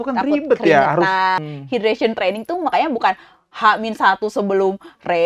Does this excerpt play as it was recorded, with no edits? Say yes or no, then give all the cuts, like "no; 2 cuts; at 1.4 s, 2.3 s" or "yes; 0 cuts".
no; 1 cut; at 1.4 s